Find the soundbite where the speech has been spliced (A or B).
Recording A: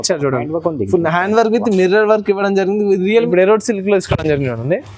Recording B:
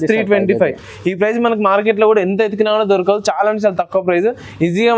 A